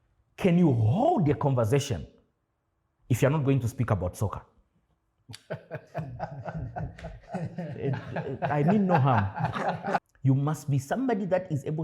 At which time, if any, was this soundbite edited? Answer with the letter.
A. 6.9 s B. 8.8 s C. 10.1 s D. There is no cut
C